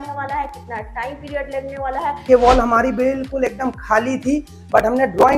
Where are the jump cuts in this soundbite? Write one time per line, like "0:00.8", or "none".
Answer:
0:02.2